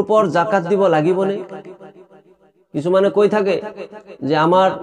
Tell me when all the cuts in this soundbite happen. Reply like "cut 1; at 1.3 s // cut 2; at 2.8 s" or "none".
none